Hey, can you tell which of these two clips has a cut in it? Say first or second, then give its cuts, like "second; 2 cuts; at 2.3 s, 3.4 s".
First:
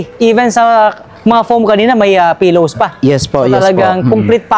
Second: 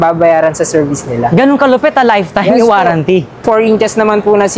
second; 1 cut; at 3.4 s